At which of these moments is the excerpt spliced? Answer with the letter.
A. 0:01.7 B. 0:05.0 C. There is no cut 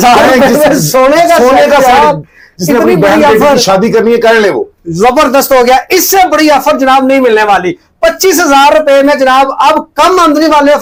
C